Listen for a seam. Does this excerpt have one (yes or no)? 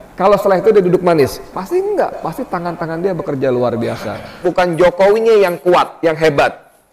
yes